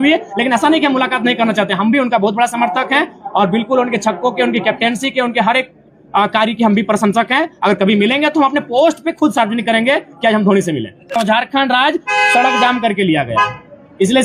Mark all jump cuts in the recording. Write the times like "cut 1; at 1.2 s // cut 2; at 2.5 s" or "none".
cut 1; at 11.2 s